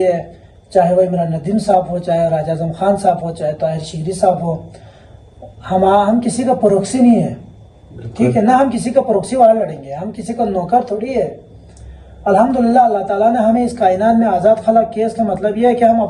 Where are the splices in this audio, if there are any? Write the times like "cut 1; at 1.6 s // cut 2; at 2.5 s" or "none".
none

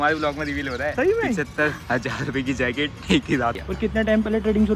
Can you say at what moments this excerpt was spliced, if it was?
cut 1; at 0.9 s // cut 2; at 3.6 s

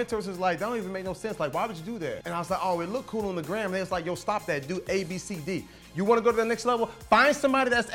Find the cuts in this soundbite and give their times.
cut 1; at 2.2 s // cut 2; at 5.8 s

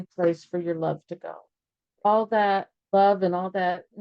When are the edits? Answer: cut 1; at 1.8 s // cut 2; at 2.8 s

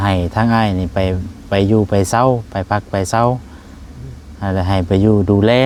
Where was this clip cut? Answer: none

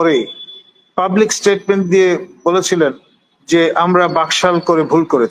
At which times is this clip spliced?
none

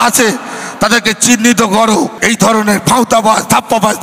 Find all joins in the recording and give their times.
cut 1; at 2.2 s

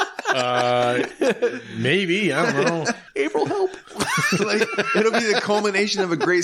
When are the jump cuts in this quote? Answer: cut 1; at 3.0 s

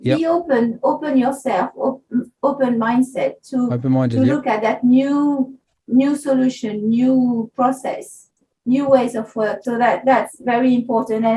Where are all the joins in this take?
cut 1; at 9.6 s

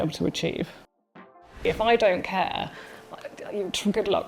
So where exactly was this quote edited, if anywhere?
cut 1; at 1.4 s

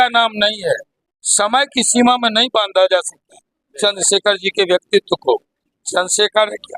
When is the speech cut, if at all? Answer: cut 1; at 5.6 s

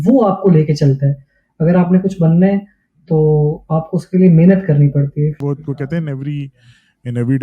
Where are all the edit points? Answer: cut 1; at 5.4 s

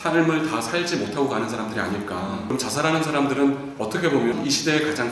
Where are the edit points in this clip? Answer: cut 1; at 2.5 s // cut 2; at 4.3 s

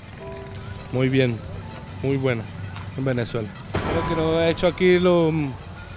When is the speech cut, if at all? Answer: cut 1; at 3.8 s

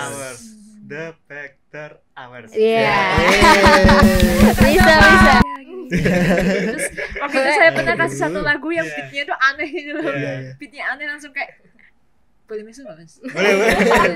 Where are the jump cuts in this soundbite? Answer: cut 1; at 5.4 s

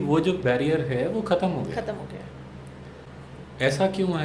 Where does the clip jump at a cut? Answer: cut 1; at 3.1 s

